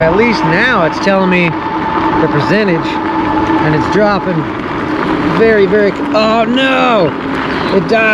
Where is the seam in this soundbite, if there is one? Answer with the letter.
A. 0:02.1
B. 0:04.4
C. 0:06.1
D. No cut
D